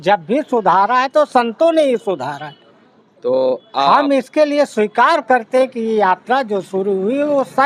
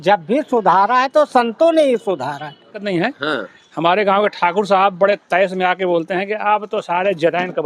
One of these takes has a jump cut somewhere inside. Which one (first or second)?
second